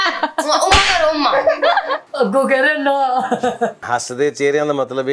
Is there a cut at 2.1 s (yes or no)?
no